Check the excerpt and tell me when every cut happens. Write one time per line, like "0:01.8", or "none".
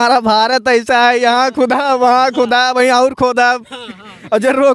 none

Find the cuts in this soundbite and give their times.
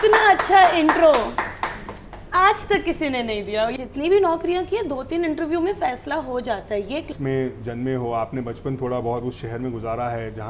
0:03.7
0:07.1

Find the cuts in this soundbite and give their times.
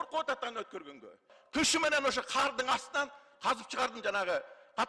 0:01.3

